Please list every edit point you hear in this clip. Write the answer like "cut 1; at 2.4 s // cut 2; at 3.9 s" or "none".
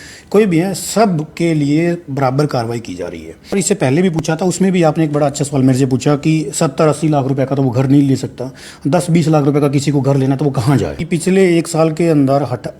cut 1; at 3.5 s // cut 2; at 10.9 s